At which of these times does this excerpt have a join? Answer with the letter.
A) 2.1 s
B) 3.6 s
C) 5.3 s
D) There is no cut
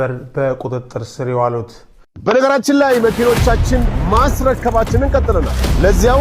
A